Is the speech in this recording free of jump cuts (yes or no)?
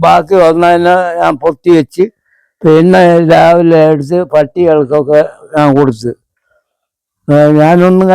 yes